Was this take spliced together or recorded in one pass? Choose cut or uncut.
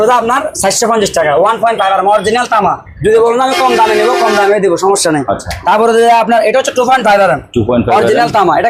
uncut